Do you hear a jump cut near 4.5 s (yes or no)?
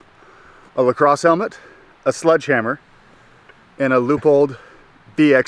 no